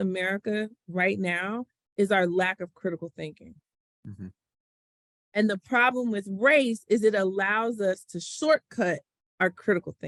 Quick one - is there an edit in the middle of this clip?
no; 0 cuts

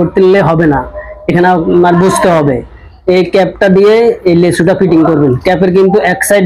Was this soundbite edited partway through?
no; 0 cuts

